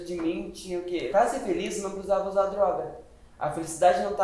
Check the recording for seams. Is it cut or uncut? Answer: cut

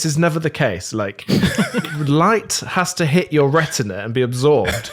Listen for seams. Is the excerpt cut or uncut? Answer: uncut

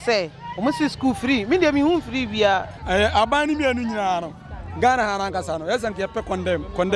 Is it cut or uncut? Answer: cut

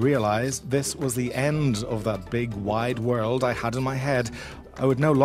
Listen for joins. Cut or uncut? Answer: uncut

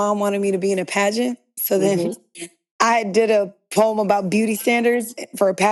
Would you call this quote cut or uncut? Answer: uncut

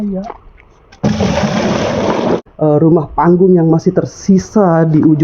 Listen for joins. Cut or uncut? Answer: cut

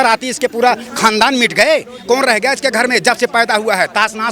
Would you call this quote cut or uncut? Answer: uncut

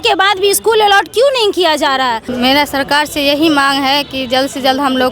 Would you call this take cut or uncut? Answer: cut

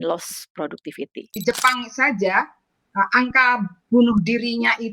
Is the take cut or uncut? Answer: cut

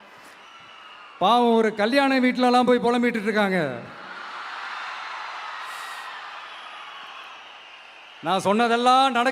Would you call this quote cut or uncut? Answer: uncut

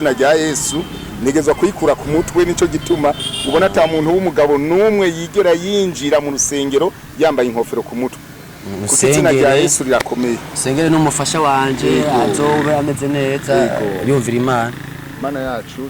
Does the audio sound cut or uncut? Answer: uncut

